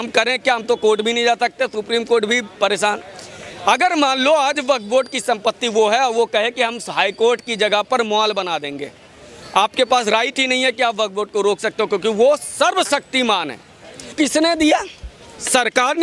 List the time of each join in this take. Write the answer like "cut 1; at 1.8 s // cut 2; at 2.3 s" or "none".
cut 1; at 14.1 s